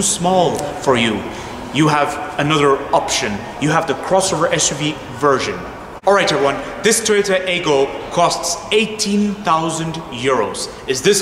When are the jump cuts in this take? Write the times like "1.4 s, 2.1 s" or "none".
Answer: none